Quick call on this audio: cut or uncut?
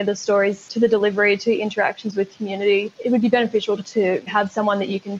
cut